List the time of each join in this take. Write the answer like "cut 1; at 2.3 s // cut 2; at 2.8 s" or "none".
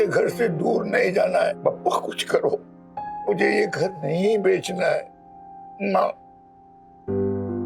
cut 1; at 1.6 s // cut 2; at 2.8 s